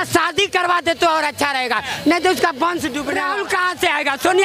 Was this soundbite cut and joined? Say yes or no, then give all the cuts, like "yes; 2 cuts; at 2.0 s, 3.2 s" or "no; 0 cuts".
yes; 1 cut; at 3.1 s